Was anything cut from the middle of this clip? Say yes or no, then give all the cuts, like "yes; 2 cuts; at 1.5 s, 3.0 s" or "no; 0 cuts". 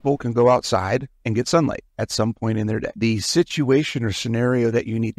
no; 0 cuts